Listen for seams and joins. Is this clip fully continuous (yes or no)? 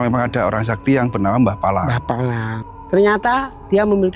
no